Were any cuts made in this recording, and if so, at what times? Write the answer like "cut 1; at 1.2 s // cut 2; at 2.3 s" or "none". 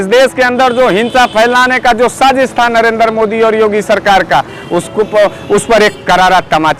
none